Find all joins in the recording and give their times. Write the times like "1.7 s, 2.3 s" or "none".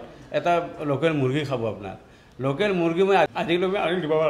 3.3 s